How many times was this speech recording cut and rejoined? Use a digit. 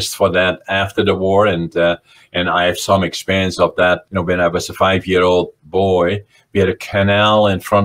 0